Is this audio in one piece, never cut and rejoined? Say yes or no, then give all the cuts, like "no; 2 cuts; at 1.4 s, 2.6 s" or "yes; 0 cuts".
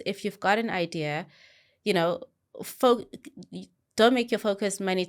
yes; 0 cuts